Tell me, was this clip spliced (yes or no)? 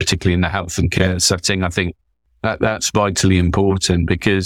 no